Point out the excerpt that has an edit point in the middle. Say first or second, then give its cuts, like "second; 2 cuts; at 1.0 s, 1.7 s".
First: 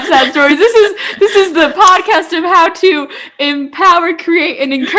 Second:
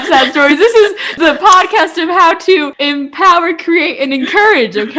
second; 2 cuts; at 1.1 s, 2.7 s